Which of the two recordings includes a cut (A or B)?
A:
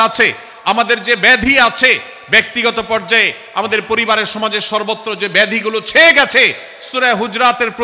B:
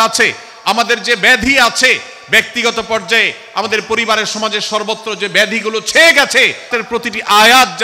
B